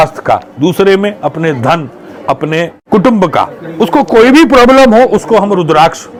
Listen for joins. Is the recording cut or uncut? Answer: uncut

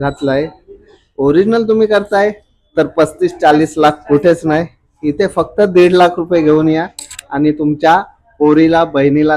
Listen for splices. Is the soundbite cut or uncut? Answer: uncut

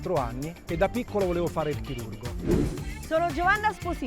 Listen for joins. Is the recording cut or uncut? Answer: cut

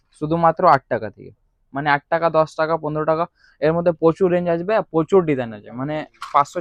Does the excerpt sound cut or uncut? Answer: uncut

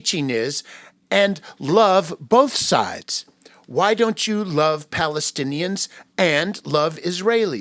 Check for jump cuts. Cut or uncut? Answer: uncut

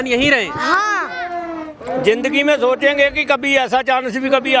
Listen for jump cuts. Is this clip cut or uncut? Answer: cut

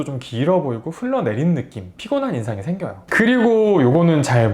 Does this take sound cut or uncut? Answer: cut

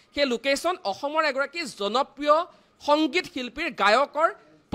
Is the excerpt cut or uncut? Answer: uncut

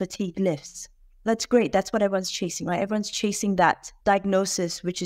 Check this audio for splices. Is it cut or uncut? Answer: cut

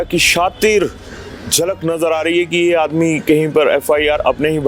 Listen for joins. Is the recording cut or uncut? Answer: uncut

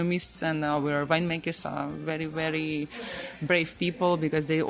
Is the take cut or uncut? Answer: uncut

